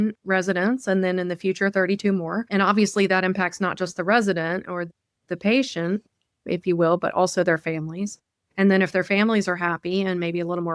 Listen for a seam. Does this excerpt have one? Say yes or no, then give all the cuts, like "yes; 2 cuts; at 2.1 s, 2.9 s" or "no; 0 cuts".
yes; 1 cut; at 2.4 s